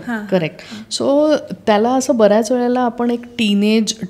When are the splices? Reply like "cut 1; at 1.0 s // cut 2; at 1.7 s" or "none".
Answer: none